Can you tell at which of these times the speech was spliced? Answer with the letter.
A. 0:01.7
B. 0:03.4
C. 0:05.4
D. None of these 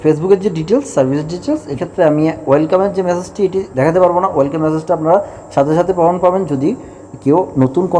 A